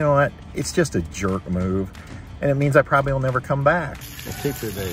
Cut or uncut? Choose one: cut